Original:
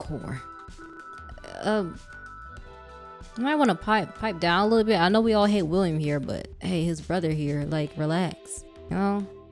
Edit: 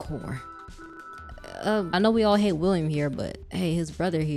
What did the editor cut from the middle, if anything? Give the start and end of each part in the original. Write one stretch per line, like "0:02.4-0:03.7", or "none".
0:01.9-0:05.0